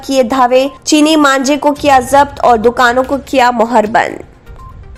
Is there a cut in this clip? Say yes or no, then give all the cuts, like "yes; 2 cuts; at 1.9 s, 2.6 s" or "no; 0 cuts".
no; 0 cuts